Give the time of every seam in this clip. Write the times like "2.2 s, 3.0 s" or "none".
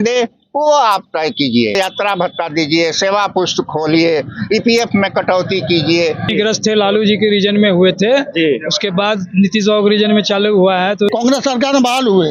1.8 s, 6.3 s, 11.1 s